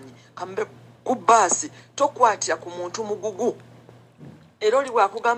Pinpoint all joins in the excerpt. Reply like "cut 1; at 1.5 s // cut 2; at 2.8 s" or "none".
none